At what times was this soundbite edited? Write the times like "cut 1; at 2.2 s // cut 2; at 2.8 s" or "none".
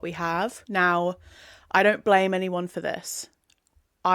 none